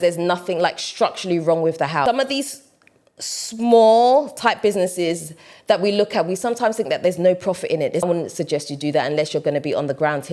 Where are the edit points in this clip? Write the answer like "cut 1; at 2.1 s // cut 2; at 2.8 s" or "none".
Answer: cut 1; at 2.0 s // cut 2; at 8.0 s